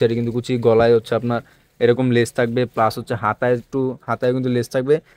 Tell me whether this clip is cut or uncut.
uncut